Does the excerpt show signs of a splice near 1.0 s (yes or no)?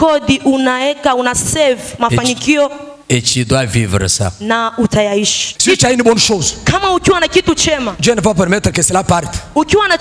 no